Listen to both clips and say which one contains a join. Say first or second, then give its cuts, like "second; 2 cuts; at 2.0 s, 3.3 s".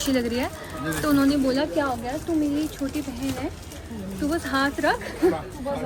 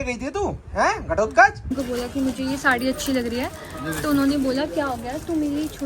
second; 1 cut; at 1.8 s